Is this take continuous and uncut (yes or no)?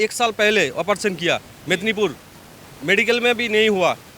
yes